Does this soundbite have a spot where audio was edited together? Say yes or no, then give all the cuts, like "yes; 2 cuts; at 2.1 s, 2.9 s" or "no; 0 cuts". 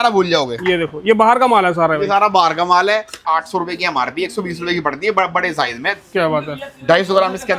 yes; 1 cut; at 3.2 s